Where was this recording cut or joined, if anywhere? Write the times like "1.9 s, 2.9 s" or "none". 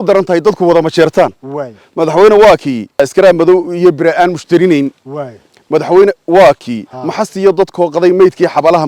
none